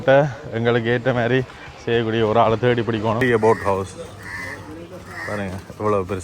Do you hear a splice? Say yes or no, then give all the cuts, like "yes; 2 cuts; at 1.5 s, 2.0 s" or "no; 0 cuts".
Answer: yes; 1 cut; at 3.2 s